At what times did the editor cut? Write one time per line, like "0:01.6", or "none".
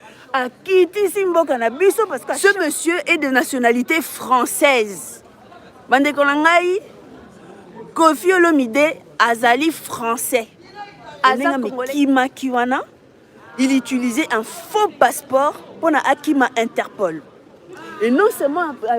0:02.2
0:11.5